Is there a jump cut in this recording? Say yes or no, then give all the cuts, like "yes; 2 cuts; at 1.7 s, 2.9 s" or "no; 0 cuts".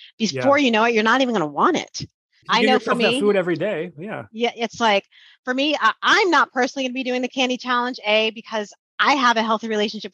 no; 0 cuts